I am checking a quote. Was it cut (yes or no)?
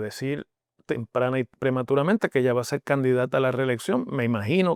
no